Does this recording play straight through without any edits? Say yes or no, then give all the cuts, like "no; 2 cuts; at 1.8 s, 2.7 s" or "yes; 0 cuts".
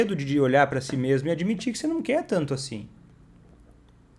yes; 0 cuts